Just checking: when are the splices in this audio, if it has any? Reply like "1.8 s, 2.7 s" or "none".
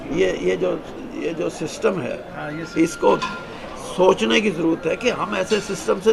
none